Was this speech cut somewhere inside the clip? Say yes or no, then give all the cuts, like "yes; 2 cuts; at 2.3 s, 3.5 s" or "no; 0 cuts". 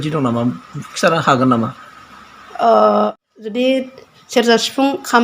yes; 1 cut; at 3.3 s